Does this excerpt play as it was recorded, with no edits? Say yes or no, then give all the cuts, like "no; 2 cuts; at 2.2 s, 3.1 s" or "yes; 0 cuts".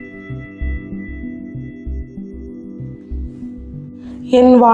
yes; 0 cuts